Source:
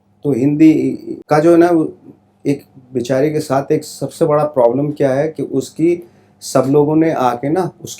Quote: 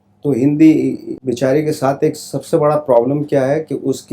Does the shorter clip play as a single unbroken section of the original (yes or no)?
no